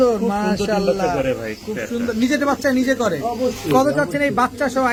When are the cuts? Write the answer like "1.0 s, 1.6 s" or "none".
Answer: none